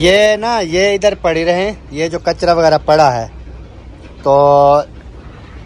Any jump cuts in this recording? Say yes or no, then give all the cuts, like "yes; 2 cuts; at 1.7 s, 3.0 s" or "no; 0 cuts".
no; 0 cuts